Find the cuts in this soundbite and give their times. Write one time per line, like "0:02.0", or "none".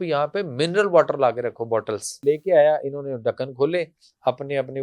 0:02.2